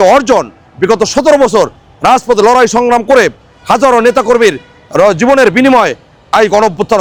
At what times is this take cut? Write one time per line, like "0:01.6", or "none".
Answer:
none